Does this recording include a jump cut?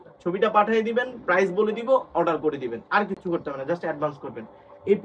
no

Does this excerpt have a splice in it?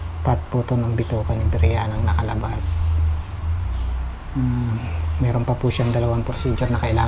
no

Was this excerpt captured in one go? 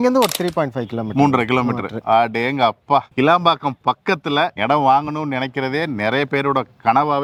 yes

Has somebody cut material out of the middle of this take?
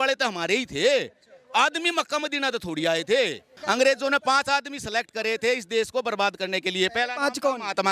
yes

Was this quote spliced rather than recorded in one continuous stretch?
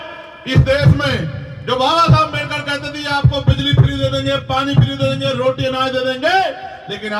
no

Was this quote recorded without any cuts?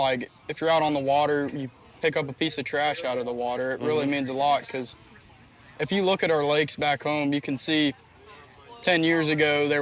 yes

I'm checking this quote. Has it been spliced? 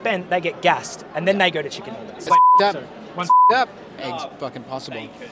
yes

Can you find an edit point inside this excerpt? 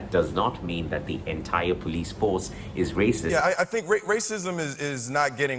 yes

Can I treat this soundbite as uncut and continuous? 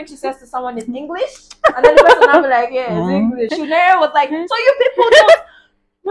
no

